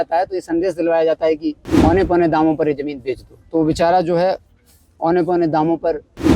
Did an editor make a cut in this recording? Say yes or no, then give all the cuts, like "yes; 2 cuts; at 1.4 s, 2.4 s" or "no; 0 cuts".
yes; 1 cut; at 1.7 s